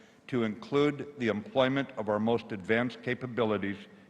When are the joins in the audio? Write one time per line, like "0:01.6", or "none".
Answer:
0:03.1

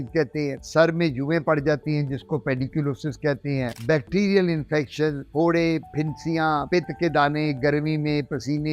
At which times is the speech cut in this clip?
none

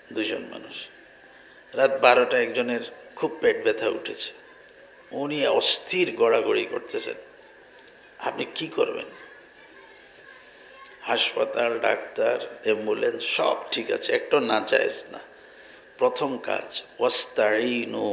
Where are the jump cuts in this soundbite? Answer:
none

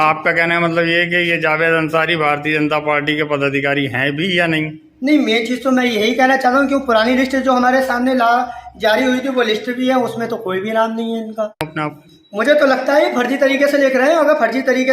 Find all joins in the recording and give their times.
0:11.5

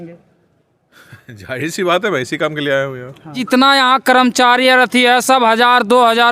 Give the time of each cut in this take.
0:03.4

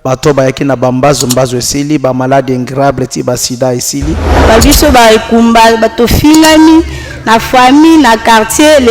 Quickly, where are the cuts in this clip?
0:04.4

